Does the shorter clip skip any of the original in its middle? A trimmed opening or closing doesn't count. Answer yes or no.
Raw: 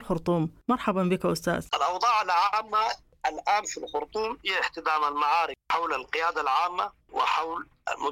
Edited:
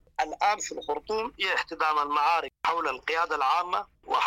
no